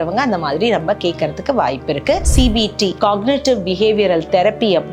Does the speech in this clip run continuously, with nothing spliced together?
no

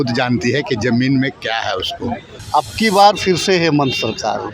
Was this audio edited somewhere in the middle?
yes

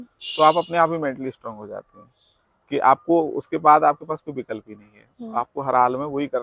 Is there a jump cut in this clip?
no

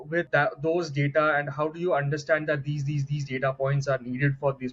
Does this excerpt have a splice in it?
no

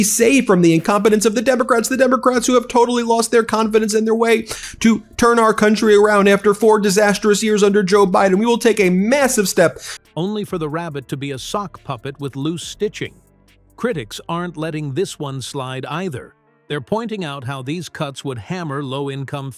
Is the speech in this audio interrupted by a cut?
no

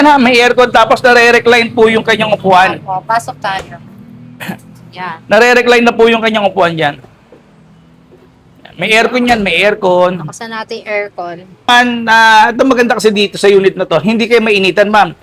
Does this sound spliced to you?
yes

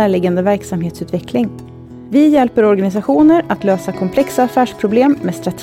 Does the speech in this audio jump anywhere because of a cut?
no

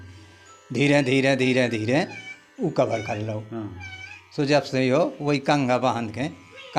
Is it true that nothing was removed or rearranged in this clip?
yes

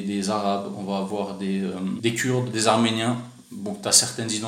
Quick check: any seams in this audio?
yes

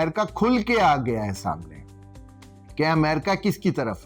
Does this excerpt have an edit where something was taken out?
no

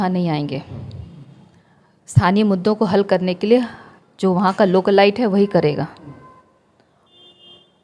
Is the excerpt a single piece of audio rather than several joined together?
yes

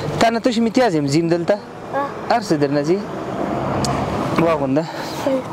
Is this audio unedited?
no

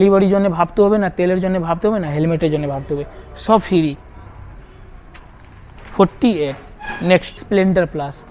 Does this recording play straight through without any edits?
yes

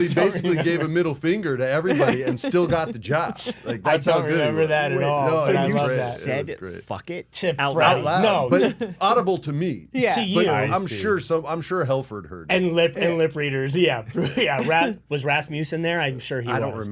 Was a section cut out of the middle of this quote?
no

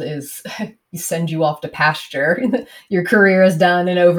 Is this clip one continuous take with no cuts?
yes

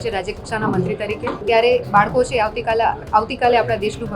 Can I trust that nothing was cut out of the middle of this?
no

